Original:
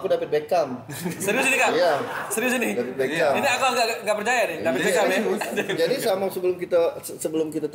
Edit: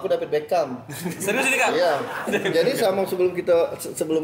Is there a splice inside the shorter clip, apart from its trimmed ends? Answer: yes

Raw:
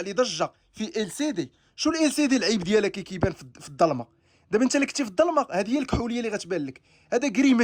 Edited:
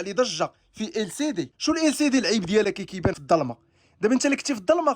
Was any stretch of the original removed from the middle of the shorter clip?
yes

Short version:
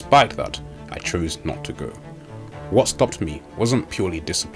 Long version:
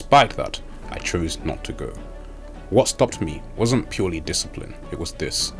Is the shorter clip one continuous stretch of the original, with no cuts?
yes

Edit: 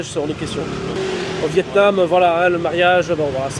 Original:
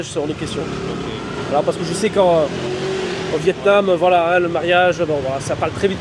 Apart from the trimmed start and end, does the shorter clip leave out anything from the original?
yes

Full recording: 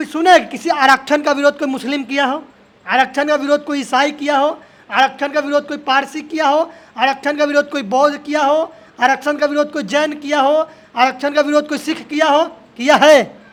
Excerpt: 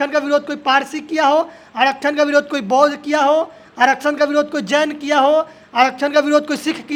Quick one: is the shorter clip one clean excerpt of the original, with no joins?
yes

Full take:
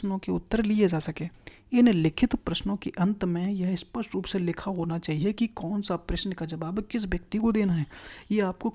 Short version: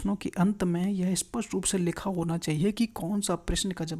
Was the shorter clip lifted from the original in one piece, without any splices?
yes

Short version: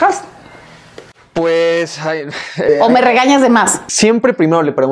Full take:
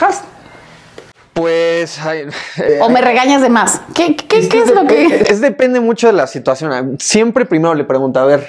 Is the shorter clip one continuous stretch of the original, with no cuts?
no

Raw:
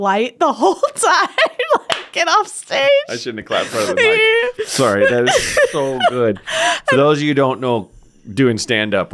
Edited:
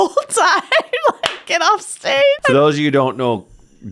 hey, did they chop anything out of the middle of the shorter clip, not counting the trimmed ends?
yes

